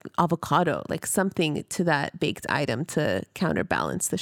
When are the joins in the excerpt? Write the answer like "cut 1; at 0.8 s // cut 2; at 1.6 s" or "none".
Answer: none